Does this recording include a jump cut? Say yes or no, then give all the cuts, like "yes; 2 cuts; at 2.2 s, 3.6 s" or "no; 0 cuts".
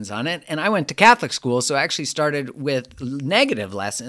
no; 0 cuts